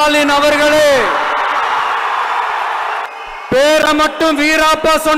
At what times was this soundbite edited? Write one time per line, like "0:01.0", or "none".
0:03.0

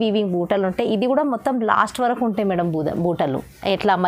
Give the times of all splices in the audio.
none

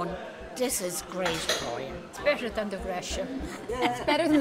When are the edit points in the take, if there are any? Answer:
none

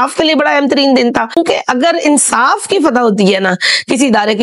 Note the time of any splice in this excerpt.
none

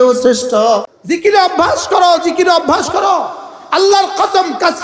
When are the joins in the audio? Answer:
0:00.9

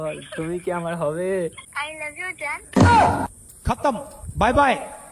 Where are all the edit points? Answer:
0:01.6

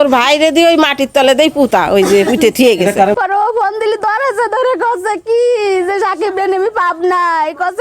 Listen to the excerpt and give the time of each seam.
0:03.1

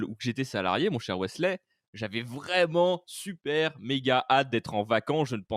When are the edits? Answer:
none

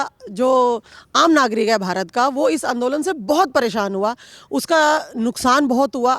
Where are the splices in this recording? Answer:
none

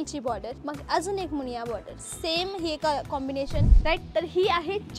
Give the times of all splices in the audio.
0:03.7

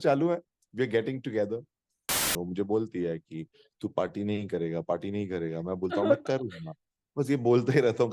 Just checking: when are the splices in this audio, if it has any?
0:02.3

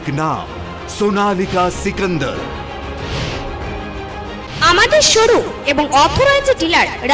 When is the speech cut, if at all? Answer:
0:04.5

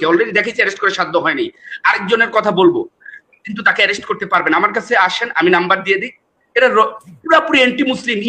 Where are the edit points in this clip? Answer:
none

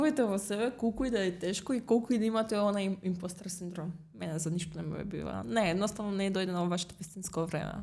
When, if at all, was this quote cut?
none

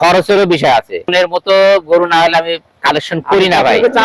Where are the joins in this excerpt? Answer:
0:01.1

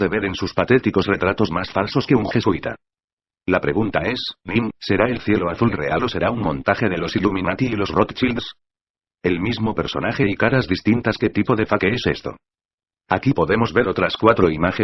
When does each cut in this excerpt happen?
0:05.6

